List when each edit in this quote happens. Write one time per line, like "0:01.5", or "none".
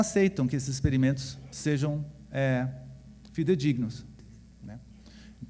0:04.1